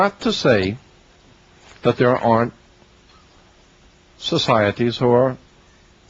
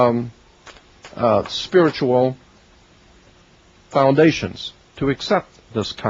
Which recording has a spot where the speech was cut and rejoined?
second; 1 cut; at 3.2 s

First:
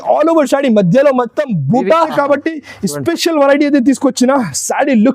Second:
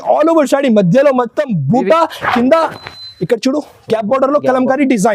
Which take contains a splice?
first; 1 cut; at 2.1 s

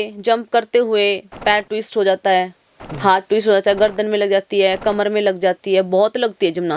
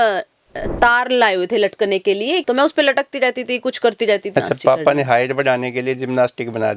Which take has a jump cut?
second; 2 cuts; at 2.4 s, 4.3 s

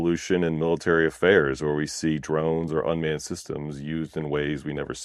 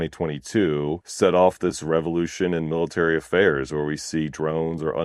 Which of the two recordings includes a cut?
second; 1 cut; at 1.0 s

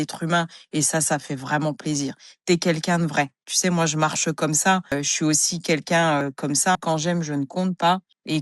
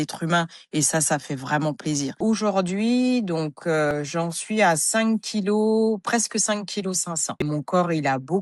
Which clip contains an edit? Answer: second; 2 cuts; at 2.2 s, 7.3 s

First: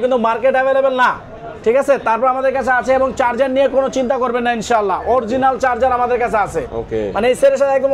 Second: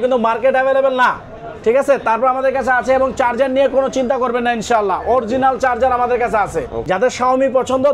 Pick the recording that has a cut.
second; 1 cut; at 6.8 s

